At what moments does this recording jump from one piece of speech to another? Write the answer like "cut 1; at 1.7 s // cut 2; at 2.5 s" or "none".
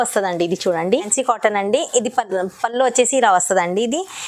cut 1; at 1.1 s

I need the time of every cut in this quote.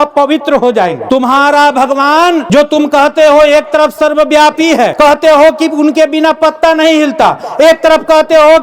cut 1; at 1.0 s // cut 2; at 2.4 s // cut 3; at 4.9 s

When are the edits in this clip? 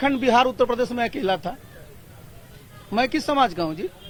none

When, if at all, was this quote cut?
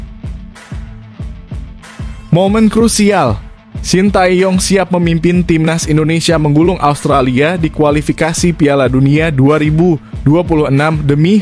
cut 1; at 2.2 s

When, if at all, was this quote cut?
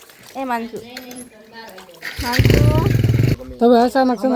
cut 1; at 3.3 s

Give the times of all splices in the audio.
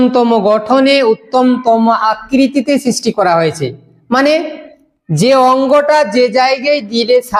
none

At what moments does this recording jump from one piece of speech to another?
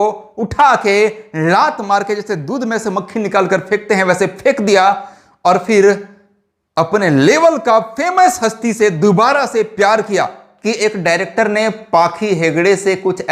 cut 1; at 10.6 s

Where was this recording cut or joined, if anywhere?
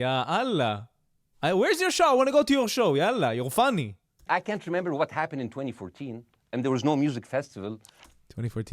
cut 1; at 4.2 s

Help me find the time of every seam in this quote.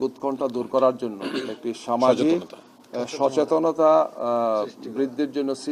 none

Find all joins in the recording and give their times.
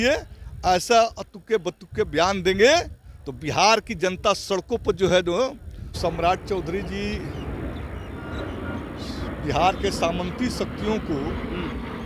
cut 1; at 5.8 s

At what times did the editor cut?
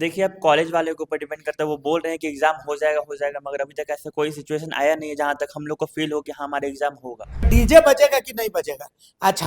cut 1; at 7.5 s

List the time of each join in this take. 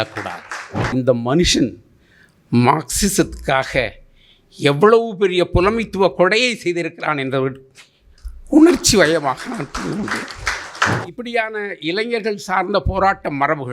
cut 1; at 0.9 s // cut 2; at 11.0 s

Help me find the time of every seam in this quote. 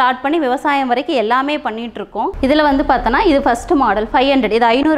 cut 1; at 2.3 s

